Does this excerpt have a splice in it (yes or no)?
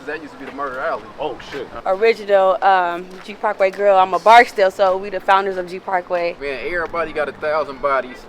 yes